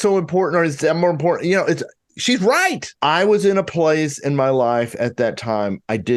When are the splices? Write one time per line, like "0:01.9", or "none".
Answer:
0:02.9